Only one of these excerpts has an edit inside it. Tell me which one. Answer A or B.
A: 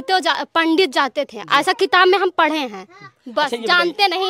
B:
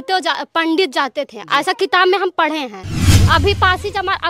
B